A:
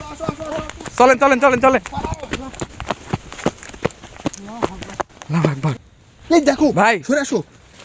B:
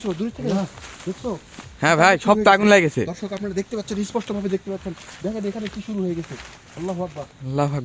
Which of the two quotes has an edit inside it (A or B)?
A